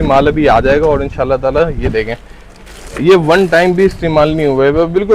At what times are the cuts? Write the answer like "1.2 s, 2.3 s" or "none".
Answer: none